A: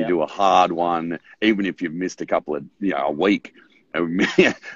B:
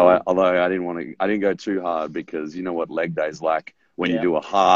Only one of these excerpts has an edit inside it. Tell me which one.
B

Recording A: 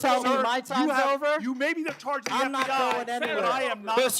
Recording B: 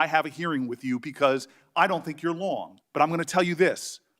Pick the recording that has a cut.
B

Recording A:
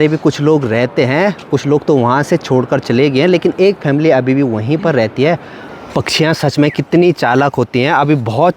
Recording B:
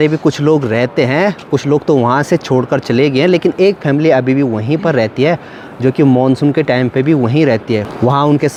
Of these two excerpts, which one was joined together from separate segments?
A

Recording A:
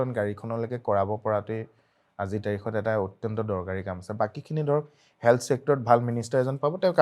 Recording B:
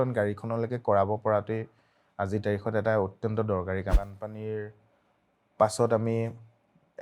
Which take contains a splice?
B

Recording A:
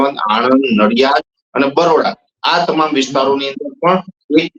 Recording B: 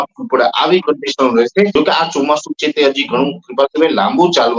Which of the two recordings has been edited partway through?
B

